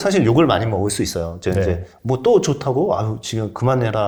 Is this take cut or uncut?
uncut